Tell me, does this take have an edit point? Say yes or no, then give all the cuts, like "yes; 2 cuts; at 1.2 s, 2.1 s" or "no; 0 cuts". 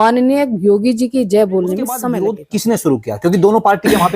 yes; 1 cut; at 2.0 s